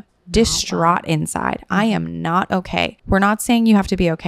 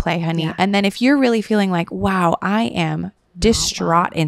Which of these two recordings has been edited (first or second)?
first